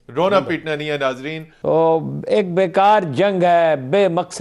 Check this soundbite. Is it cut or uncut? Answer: cut